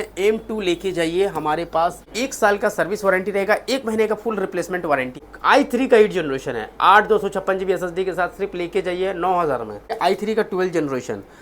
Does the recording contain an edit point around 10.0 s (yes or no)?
yes